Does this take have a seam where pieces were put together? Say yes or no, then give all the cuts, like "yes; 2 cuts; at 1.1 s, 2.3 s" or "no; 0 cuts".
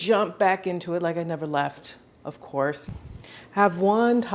no; 0 cuts